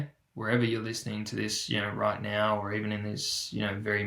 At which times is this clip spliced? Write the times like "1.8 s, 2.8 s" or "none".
none